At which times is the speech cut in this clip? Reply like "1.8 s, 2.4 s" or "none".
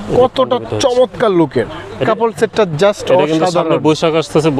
2.0 s